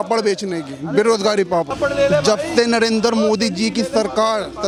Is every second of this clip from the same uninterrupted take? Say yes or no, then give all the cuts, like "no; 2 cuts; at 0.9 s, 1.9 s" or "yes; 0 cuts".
yes; 0 cuts